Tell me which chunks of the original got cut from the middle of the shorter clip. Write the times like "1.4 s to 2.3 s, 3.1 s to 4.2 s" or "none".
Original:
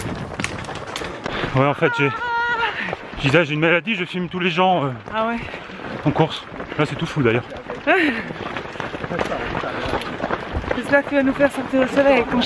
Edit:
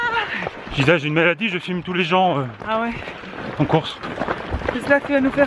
6.5 s to 10.1 s